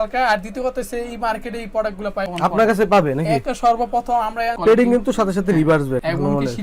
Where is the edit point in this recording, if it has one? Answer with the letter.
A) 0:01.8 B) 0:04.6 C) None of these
B